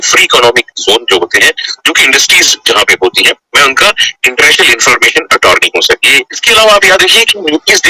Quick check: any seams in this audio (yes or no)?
yes